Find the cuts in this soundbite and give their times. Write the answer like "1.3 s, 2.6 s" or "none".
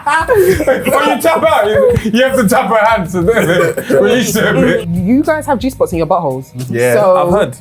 4.8 s